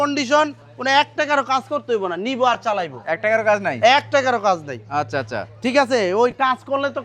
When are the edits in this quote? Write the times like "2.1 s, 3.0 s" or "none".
none